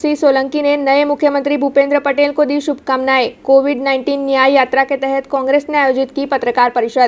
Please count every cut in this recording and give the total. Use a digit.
0